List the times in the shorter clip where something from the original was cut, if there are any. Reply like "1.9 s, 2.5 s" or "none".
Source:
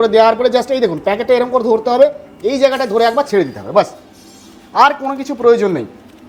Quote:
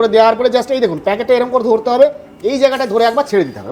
none